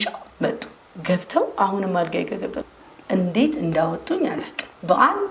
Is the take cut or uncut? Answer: cut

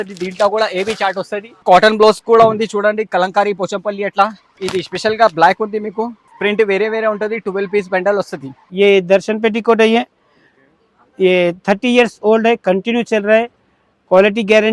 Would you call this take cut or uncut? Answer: cut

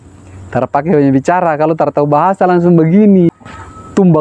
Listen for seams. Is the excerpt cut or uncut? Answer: cut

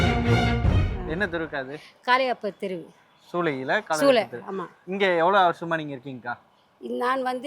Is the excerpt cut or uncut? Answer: cut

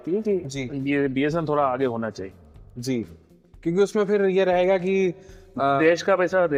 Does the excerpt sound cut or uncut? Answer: uncut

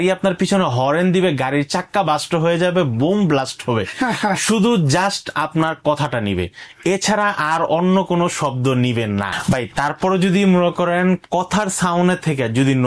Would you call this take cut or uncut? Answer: cut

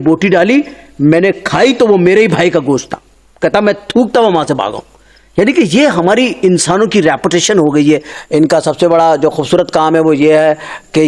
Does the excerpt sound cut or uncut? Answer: cut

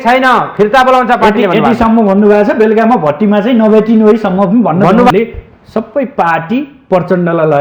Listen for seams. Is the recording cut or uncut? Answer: cut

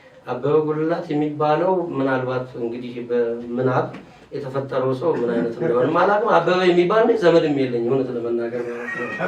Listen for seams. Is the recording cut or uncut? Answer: uncut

